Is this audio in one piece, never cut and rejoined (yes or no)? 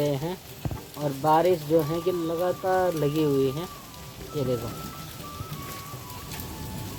yes